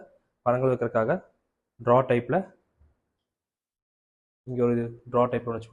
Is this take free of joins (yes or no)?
yes